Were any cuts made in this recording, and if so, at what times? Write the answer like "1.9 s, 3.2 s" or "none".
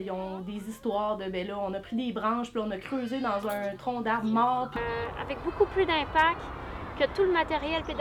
5.1 s